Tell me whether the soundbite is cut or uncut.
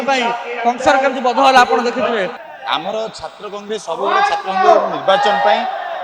cut